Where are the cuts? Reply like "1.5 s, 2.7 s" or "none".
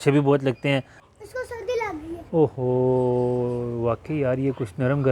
1.0 s